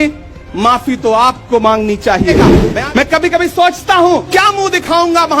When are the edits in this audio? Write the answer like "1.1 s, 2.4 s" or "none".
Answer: 2.4 s, 4.3 s

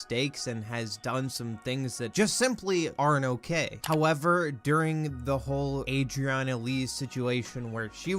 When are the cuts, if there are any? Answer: 3.6 s

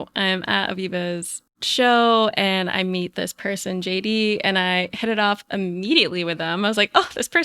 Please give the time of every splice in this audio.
1.4 s

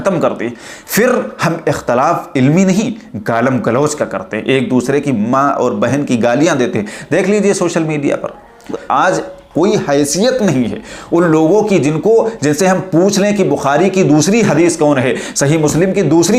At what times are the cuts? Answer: 8.8 s

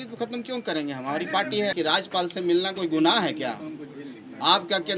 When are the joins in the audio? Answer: 1.7 s

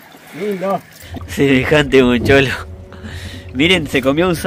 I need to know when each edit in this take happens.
1.0 s

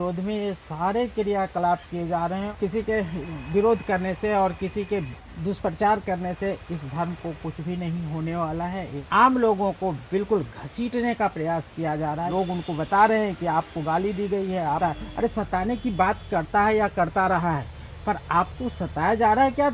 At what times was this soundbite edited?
2.5 s, 9.0 s, 12.3 s, 14.8 s

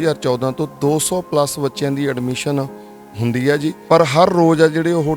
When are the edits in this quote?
3.8 s

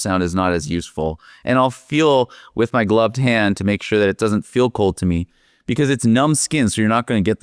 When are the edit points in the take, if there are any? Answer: none

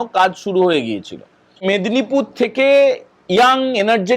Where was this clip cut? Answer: 1.6 s

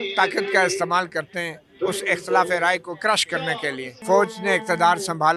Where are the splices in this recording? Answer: 3.9 s

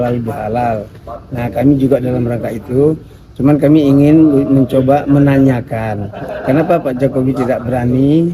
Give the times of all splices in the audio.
none

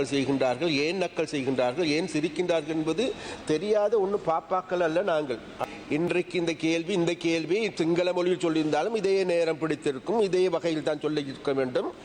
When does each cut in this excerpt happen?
5.6 s

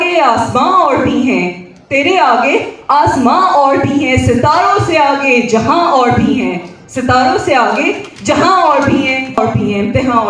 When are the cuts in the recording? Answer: 9.4 s

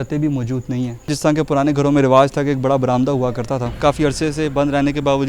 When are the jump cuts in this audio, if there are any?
1.1 s, 3.8 s

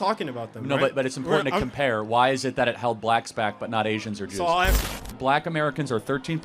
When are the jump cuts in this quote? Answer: 5.0 s

